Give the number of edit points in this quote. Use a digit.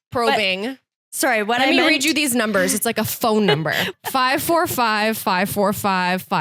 1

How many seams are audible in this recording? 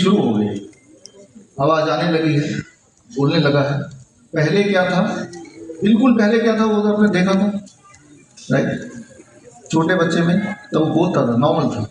0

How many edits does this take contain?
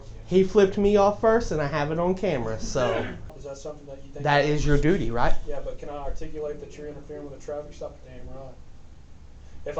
1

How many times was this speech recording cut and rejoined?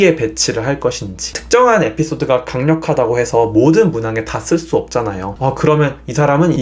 1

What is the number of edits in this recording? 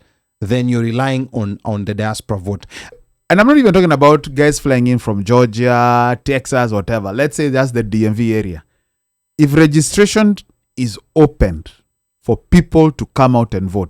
1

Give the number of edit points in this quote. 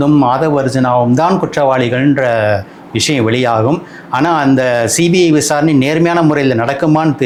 0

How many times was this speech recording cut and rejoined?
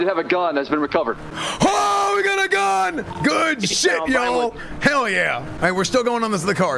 0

